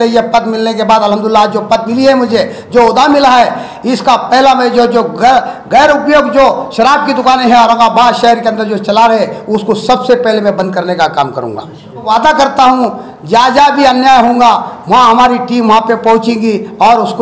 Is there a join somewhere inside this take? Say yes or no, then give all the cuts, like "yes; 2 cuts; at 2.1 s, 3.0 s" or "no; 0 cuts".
yes; 1 cut; at 12.1 s